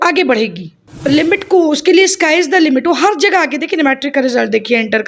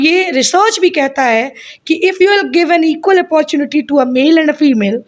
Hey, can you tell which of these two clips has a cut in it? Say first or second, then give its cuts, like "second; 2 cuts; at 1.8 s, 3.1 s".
first; 1 cut; at 0.9 s